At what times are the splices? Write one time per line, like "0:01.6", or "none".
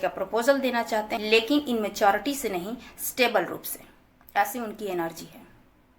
0:01.2